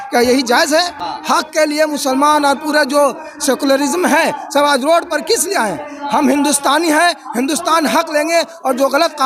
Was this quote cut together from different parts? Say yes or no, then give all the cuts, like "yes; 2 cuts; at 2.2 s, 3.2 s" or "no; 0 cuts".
yes; 1 cut; at 1.0 s